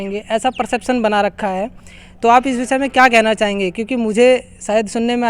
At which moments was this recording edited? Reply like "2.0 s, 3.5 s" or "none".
none